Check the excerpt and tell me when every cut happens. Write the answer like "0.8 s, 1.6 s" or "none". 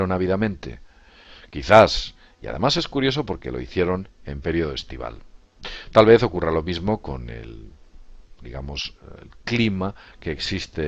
4.4 s

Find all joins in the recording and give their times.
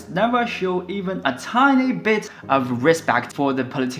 none

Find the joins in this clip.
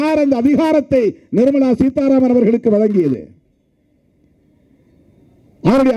none

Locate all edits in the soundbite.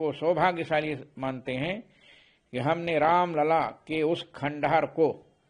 none

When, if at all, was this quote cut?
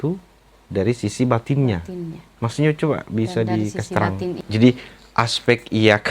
4.4 s

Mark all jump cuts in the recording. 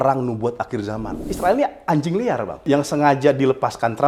1.2 s, 2.7 s

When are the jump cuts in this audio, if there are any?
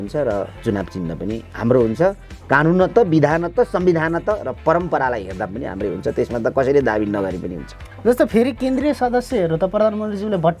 none

